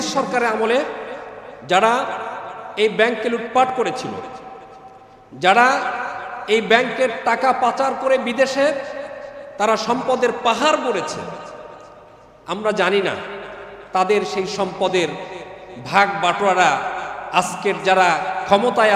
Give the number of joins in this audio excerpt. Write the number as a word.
zero